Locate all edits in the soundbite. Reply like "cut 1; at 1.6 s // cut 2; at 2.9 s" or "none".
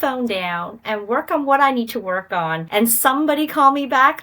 cut 1; at 2.6 s